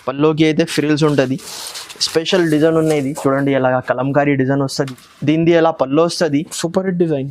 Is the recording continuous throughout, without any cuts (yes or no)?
no